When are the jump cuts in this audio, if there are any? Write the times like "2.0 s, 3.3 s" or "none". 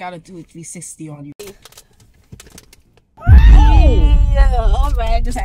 1.5 s

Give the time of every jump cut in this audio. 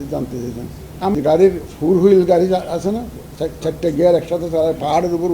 1.2 s

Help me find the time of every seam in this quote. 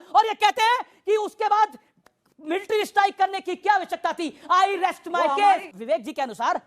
5.7 s

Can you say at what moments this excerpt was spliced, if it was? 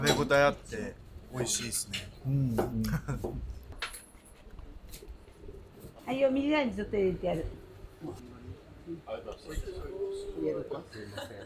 3.6 s, 6.0 s, 8.2 s

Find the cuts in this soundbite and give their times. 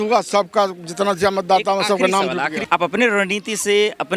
2.6 s

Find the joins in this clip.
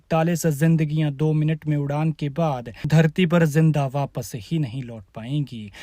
2.7 s

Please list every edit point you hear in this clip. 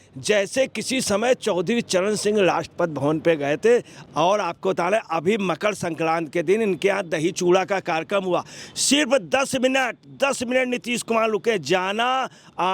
4.0 s

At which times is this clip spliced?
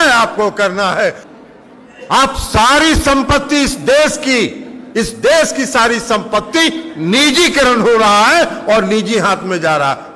1.3 s

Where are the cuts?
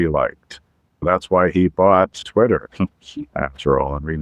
1.0 s, 2.2 s

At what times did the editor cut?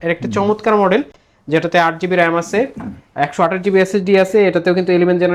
none

